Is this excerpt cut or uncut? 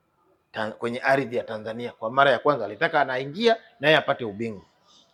uncut